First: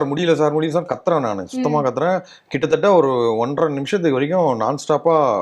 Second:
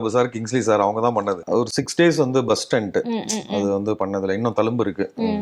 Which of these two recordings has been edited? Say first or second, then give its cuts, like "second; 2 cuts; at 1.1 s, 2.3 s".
second; 1 cut; at 1.4 s